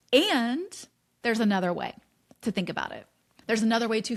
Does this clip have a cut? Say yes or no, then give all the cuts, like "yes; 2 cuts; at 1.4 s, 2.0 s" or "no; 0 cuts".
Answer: no; 0 cuts